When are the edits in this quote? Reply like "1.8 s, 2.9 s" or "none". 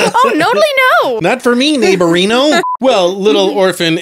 1.2 s, 2.6 s